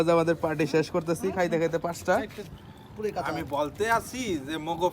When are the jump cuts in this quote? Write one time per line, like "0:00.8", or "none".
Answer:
0:02.4